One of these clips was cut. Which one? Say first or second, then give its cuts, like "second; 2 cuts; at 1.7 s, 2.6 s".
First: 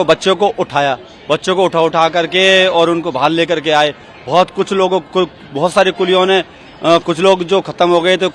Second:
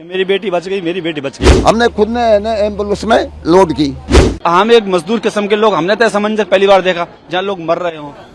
second; 2 cuts; at 1.5 s, 4.3 s